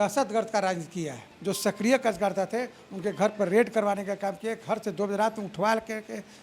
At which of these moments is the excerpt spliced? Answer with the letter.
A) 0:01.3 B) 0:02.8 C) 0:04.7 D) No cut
A